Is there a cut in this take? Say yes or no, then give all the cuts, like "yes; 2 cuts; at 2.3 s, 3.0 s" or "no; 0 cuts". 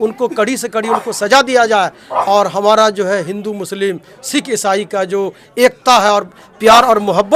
no; 0 cuts